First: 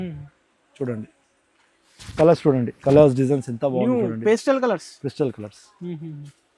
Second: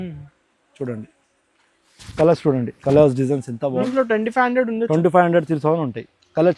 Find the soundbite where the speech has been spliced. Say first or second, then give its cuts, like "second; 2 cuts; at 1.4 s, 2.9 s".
second; 1 cut; at 3.9 s